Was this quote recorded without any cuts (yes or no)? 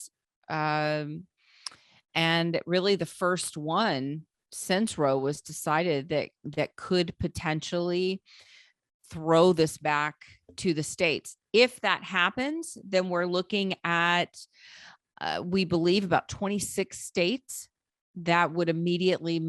yes